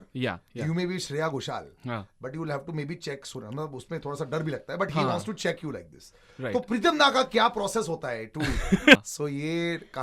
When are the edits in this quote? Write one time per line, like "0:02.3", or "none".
0:09.0

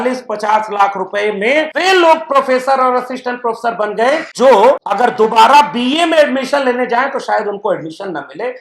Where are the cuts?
0:01.7
0:04.3
0:04.9

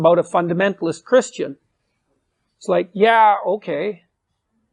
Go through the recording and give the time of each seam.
none

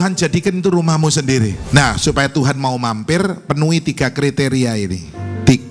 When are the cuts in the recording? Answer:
0:01.6

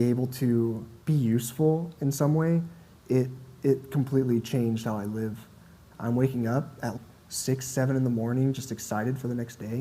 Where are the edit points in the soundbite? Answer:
0:00.9
0:05.8

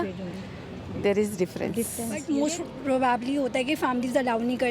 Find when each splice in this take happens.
0:02.2

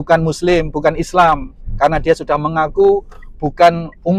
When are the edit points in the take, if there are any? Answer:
none

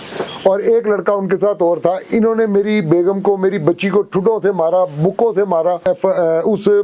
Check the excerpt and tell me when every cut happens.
0:05.8

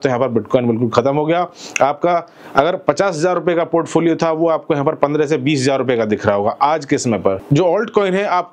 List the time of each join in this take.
0:07.4

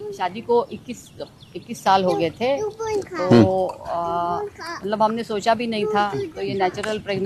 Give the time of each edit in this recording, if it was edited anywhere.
none

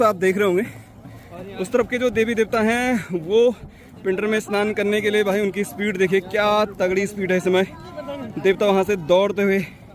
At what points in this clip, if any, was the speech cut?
none

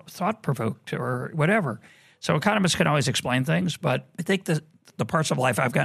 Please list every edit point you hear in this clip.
0:04.1

